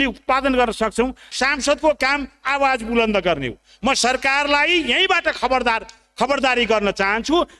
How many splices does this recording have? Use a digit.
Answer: 1